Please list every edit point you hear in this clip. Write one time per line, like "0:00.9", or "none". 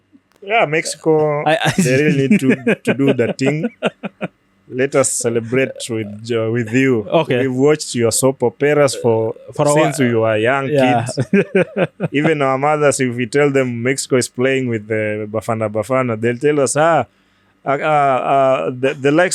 none